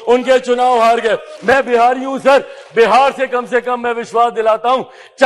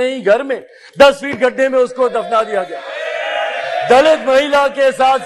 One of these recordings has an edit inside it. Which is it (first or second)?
first